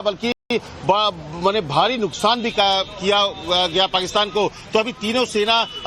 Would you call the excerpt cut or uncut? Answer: uncut